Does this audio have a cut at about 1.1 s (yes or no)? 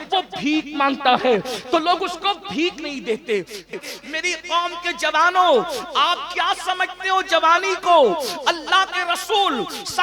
no